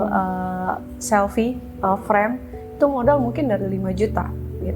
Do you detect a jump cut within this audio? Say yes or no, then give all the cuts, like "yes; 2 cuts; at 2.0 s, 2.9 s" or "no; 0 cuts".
no; 0 cuts